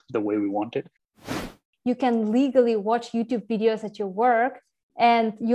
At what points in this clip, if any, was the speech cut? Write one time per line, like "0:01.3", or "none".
0:01.2